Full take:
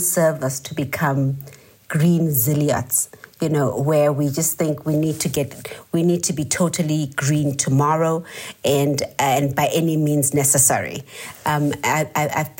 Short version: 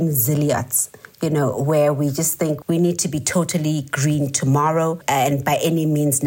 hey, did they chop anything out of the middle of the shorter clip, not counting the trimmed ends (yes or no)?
yes